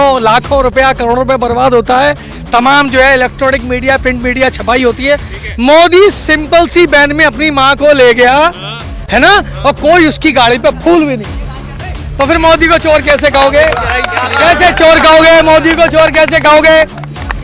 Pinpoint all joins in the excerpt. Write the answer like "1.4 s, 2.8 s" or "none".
none